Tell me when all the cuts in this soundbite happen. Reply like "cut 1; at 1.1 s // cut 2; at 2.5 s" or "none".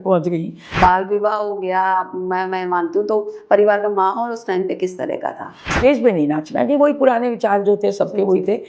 cut 1; at 0.8 s // cut 2; at 5.7 s